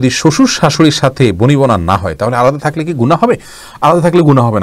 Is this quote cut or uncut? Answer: uncut